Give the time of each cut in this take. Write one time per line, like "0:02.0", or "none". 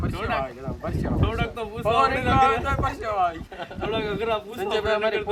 none